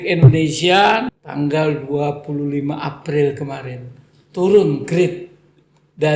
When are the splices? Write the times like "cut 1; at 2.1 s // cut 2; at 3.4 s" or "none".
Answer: cut 1; at 1.1 s